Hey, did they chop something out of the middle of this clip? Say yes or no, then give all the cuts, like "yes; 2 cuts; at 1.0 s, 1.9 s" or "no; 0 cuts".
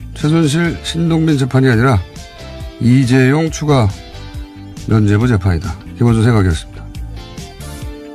no; 0 cuts